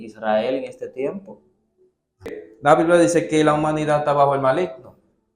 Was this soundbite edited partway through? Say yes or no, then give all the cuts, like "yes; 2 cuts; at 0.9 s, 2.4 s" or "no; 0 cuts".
yes; 1 cut; at 2.4 s